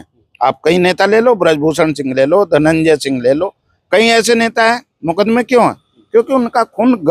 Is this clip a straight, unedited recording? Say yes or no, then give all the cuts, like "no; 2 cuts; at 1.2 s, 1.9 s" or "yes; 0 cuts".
yes; 0 cuts